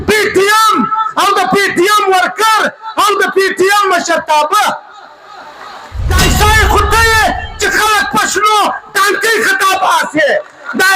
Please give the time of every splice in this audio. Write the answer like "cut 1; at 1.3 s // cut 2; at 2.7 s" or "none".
cut 1; at 6.0 s